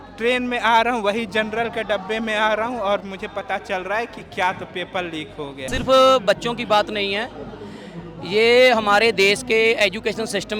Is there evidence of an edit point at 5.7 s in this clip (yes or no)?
yes